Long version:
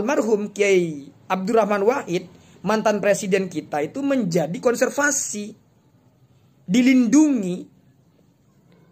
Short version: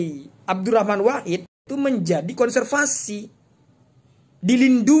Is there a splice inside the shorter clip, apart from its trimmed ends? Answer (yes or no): yes